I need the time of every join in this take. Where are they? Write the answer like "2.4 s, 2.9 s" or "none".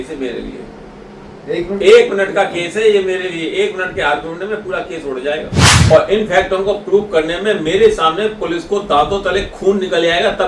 5.7 s